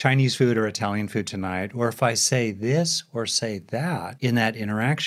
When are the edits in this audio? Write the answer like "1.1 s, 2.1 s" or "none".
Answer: 4.1 s